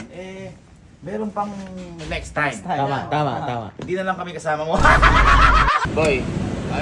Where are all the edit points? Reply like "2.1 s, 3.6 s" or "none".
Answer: 5.9 s